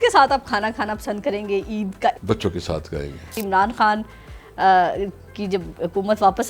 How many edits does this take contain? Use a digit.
2